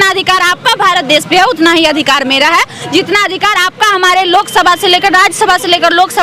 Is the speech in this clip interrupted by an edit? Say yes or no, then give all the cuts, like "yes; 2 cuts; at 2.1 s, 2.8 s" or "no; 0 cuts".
no; 0 cuts